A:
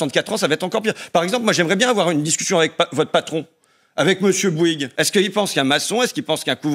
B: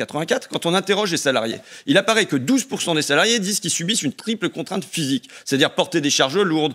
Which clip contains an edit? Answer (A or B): A